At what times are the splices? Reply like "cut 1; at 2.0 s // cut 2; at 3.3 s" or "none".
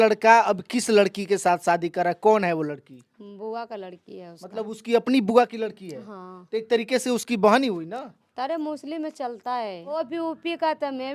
cut 1; at 9.9 s